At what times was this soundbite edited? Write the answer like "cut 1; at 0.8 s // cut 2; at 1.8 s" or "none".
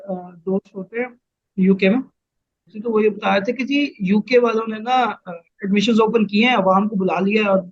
cut 1; at 2.7 s